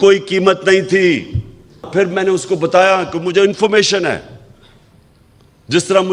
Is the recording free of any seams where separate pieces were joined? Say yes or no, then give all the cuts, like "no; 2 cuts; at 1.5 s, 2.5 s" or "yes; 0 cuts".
no; 1 cut; at 1.9 s